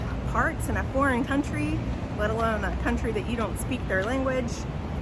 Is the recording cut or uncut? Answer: uncut